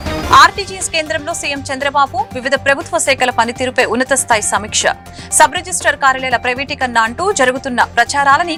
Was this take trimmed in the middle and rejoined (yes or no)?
no